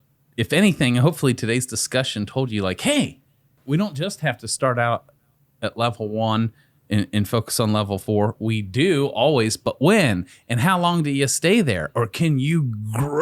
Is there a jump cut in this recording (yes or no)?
yes